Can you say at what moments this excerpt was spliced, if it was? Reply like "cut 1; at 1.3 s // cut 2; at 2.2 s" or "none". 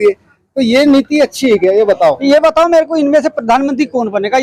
none